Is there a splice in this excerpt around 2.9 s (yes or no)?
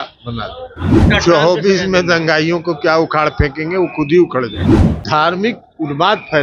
no